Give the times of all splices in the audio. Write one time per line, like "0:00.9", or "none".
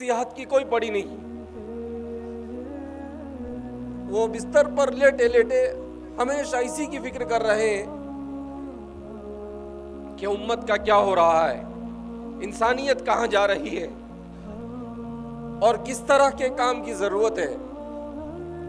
0:13.9
0:15.3
0:17.6